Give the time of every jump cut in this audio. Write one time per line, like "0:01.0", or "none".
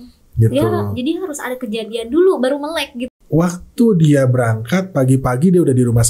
0:03.0